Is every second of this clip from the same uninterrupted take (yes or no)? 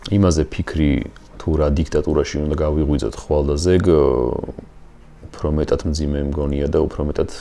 yes